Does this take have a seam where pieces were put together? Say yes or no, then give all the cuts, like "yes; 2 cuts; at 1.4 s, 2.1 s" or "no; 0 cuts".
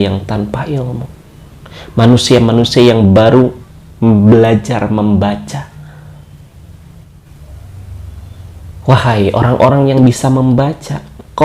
yes; 1 cut; at 7.2 s